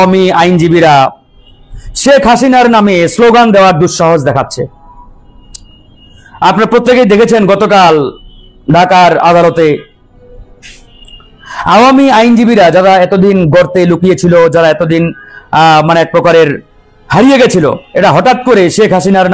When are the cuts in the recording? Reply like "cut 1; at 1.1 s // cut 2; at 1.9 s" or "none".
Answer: none

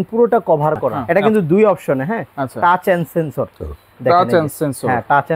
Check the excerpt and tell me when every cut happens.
cut 1; at 1.0 s

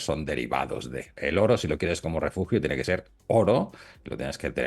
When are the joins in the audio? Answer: cut 1; at 1.1 s

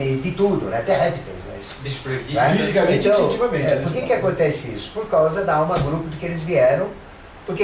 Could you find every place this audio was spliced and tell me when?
none

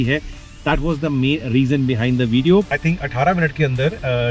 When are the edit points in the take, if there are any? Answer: cut 1; at 2.8 s

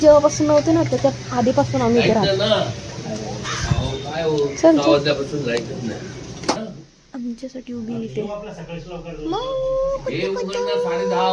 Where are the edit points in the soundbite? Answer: none

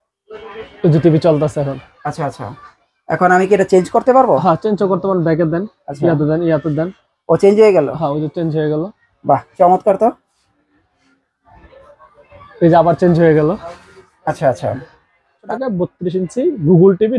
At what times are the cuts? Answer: cut 1; at 15.4 s

